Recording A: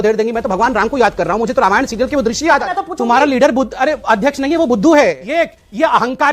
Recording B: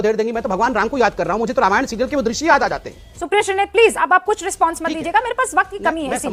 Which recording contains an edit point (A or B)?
A